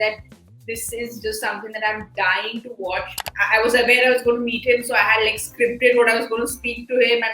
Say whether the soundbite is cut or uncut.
cut